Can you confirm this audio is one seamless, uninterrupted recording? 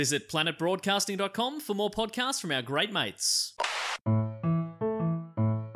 no; 1 cut; at 4.1 s

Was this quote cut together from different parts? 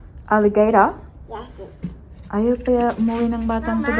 no; 0 cuts

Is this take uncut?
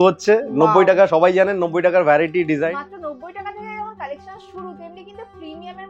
no; 1 cut; at 2.7 s

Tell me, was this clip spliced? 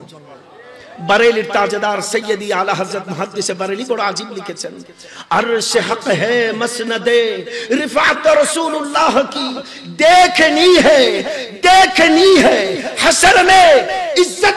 no; 0 cuts

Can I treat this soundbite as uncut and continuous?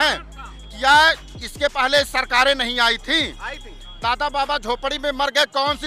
yes; 0 cuts

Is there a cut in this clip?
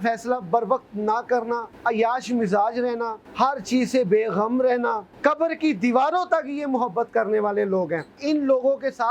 yes; 4 cuts; at 1.7 s, 3.2 s, 5.1 s, 8.2 s

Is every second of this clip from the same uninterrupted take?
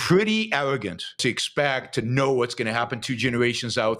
no; 1 cut; at 1.2 s

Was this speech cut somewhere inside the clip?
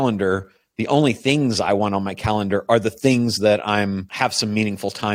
yes; 1 cut; at 4.1 s

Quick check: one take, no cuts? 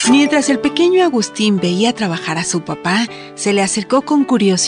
yes; 0 cuts

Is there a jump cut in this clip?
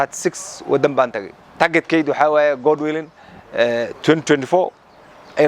yes; 1 cut; at 1.5 s

